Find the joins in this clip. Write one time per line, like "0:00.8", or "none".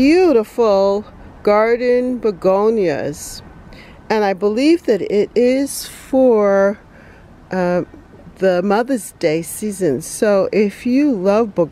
none